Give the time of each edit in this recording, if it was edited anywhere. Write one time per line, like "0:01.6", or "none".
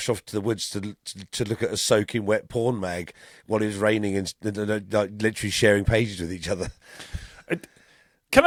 none